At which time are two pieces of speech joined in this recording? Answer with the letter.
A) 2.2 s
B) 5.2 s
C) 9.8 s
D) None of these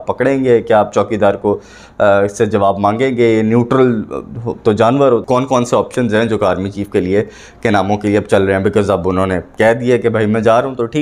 B